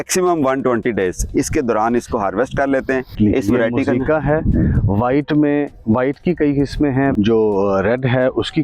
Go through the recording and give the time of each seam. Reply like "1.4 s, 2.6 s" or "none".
3.1 s, 7.1 s